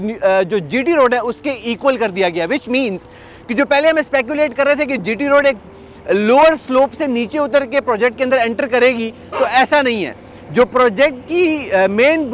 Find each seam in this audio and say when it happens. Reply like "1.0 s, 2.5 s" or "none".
none